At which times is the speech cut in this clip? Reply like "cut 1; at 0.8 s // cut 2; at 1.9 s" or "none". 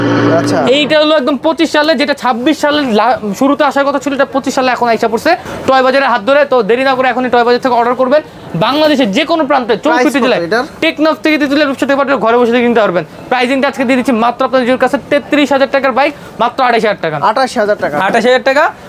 none